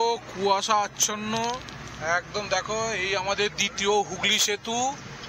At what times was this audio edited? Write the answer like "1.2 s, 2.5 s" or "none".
none